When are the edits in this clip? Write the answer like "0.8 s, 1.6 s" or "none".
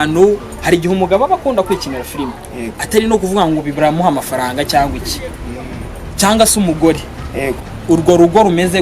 7.7 s